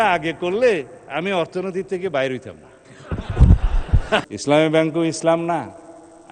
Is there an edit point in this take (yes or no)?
yes